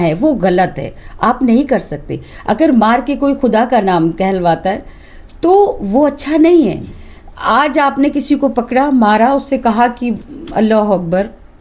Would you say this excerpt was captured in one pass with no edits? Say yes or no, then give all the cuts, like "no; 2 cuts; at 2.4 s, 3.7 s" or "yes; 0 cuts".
yes; 0 cuts